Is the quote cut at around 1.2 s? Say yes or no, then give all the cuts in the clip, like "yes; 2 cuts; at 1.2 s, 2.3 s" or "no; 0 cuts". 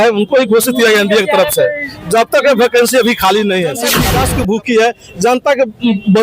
no; 1 cut; at 3.9 s